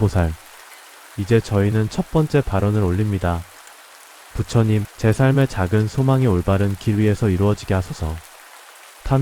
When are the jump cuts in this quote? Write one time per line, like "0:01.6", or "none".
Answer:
0:01.1